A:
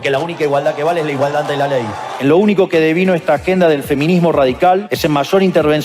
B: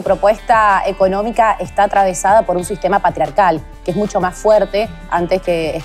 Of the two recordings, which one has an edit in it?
A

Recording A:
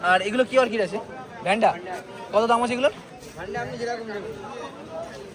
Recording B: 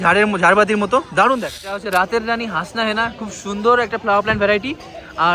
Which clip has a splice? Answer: B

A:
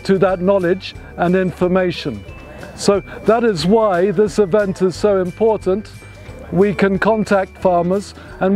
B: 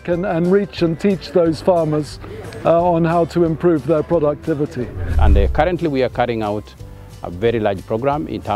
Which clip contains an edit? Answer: B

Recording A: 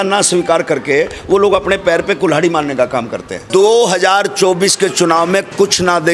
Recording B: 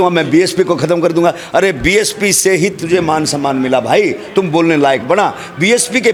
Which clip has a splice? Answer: A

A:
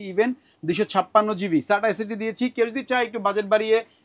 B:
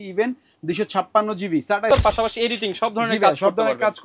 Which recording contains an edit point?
B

